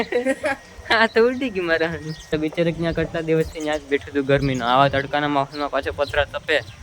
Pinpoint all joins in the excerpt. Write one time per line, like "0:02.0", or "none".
0:02.3